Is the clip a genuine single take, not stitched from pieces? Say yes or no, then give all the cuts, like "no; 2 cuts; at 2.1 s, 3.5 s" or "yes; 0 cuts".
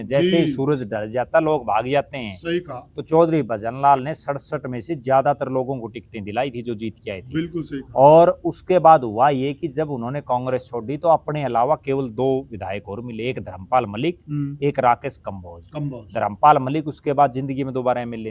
yes; 0 cuts